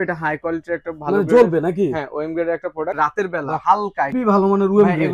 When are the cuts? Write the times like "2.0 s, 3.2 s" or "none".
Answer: 4.1 s